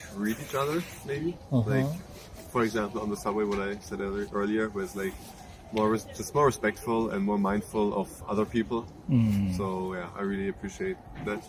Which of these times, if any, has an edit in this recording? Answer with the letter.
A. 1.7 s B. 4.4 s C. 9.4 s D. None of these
D